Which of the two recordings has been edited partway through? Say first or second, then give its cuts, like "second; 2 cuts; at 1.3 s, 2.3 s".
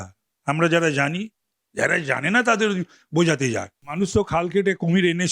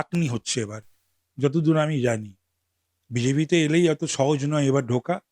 first; 1 cut; at 3.8 s